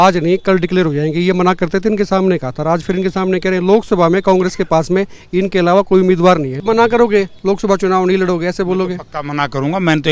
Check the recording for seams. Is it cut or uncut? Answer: cut